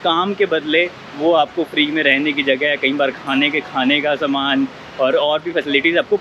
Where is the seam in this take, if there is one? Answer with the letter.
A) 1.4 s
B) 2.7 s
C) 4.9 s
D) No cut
D